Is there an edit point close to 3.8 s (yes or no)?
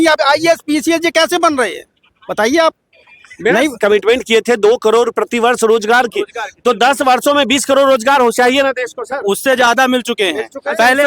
yes